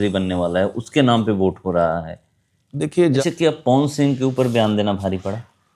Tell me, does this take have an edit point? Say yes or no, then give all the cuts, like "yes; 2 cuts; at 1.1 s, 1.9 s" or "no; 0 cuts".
yes; 1 cut; at 3.2 s